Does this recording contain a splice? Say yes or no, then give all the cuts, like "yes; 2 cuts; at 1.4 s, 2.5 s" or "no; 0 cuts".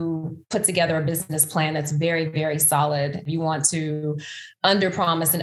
yes; 1 cut; at 3.3 s